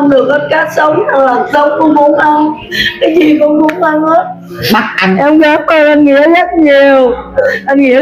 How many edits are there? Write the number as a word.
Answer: one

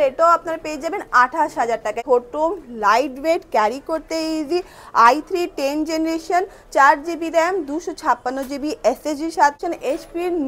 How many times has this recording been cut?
two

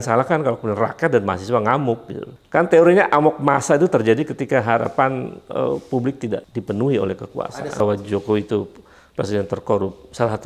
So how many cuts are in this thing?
three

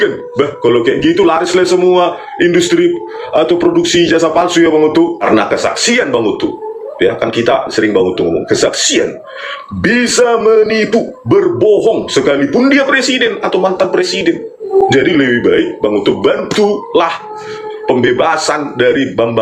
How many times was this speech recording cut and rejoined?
two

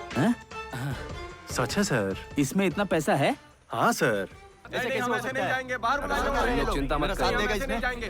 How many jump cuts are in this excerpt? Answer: two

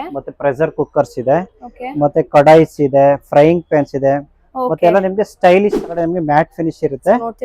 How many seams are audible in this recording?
one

